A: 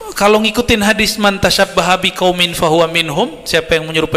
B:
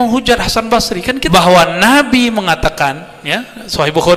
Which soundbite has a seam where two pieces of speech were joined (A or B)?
B